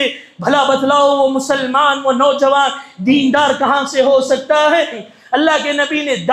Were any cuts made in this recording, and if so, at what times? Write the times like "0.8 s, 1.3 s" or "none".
5.0 s